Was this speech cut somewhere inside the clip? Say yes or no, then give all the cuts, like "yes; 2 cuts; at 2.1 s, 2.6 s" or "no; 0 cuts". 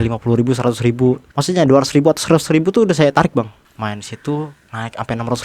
yes; 2 cuts; at 1.3 s, 3.6 s